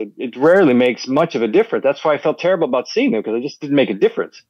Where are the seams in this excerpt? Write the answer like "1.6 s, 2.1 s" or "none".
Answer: none